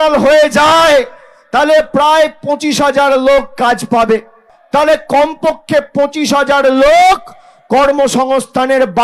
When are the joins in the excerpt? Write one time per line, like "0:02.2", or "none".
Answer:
0:04.5

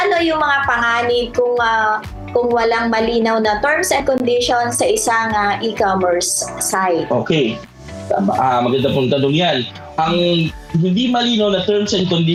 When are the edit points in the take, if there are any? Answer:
none

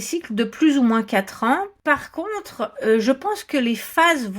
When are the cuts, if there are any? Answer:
0:01.7

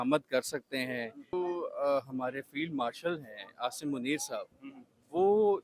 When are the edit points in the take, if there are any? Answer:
0:01.3

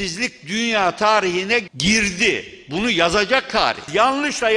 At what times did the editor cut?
0:01.7
0:03.8

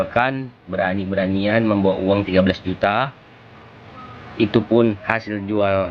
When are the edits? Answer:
none

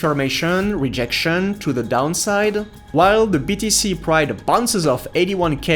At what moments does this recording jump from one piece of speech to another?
0:02.7

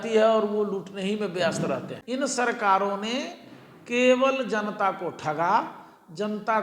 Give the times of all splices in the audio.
0:01.9

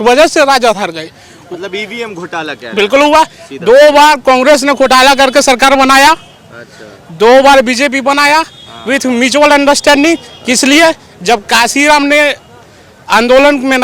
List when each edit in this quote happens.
none

